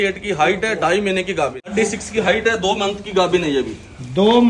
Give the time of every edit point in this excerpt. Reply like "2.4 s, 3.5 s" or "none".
1.7 s